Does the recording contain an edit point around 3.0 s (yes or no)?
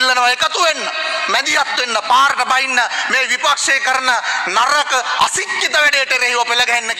no